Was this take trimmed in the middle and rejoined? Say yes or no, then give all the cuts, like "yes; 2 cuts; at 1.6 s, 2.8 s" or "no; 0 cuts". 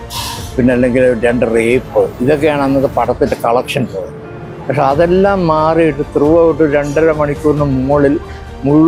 no; 0 cuts